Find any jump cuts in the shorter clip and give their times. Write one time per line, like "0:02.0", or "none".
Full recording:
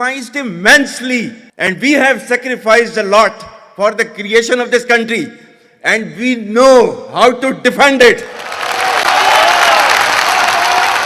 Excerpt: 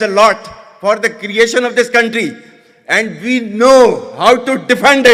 none